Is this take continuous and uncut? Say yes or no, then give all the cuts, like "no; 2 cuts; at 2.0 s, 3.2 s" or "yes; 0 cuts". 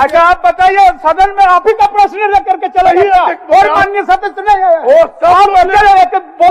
yes; 0 cuts